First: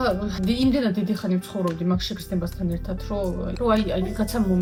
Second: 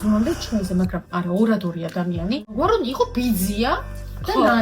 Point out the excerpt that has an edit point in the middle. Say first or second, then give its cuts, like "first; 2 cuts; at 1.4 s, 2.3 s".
second; 1 cut; at 2.5 s